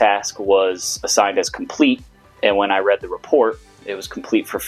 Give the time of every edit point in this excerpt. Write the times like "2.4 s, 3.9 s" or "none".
none